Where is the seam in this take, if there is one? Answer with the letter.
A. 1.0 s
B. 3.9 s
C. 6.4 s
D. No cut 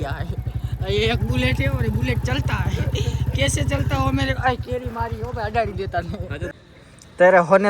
C